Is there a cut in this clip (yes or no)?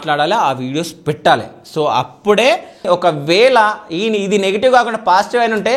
yes